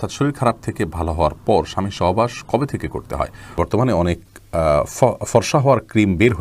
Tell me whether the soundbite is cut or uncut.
cut